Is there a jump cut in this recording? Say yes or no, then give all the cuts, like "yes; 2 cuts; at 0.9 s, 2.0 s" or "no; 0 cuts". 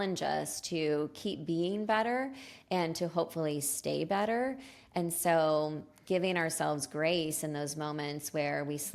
no; 0 cuts